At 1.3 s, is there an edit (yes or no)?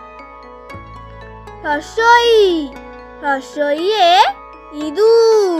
yes